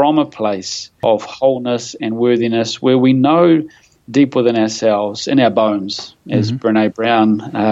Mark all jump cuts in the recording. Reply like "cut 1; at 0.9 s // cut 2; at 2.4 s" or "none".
cut 1; at 0.9 s